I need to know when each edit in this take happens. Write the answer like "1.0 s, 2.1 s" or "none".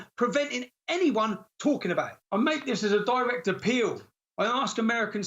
2.2 s